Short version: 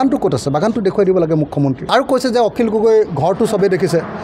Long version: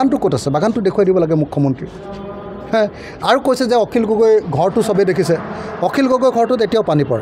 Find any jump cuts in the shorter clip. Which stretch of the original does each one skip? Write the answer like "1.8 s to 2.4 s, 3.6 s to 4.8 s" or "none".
1.8 s to 3.2 s